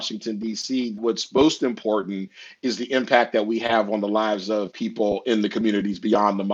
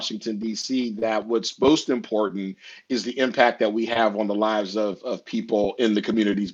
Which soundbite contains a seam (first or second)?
first